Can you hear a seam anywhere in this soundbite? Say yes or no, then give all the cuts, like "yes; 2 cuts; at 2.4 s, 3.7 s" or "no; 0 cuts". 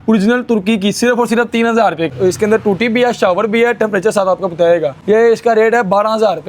yes; 2 cuts; at 2.1 s, 4.9 s